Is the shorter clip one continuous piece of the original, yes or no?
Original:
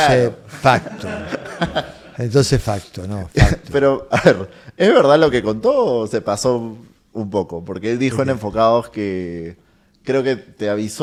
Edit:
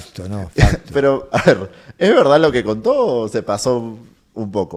yes